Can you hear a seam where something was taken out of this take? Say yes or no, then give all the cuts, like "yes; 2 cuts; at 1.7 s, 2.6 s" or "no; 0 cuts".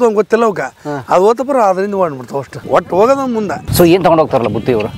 yes; 2 cuts; at 2.5 s, 3.6 s